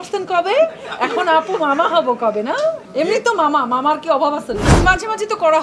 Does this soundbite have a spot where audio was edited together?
yes; 2 cuts; at 2.8 s, 4.7 s

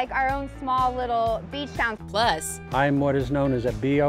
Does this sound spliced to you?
yes; 1 cut; at 2.2 s

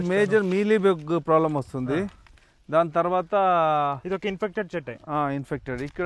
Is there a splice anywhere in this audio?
no; 0 cuts

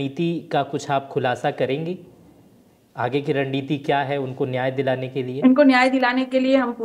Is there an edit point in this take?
no; 0 cuts

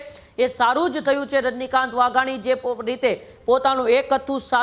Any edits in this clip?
no; 0 cuts

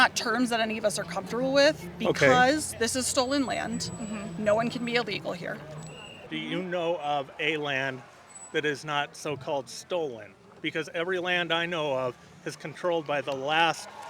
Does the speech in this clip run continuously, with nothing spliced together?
yes; 0 cuts

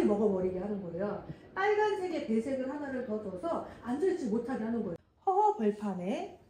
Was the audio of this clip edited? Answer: yes; 1 cut; at 5.0 s

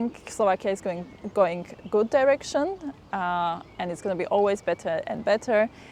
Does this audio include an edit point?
no; 0 cuts

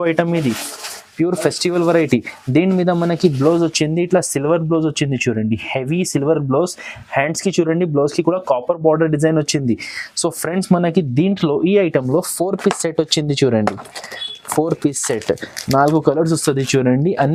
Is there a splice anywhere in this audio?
no; 0 cuts

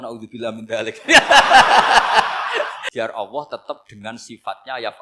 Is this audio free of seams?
no; 1 cut; at 2.8 s

